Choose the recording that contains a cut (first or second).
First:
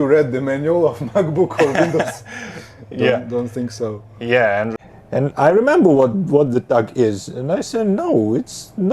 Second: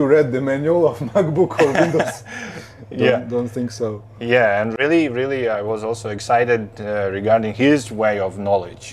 first